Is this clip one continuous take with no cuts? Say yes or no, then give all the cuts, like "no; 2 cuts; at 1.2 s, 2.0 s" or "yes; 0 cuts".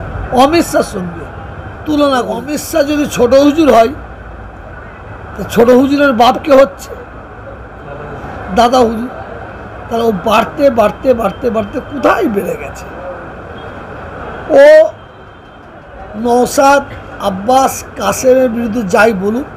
no; 1 cut; at 2.6 s